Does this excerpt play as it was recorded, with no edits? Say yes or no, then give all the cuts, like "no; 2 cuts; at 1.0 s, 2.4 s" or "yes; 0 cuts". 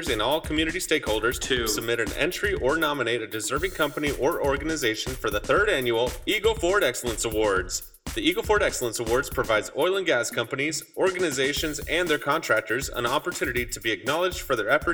yes; 0 cuts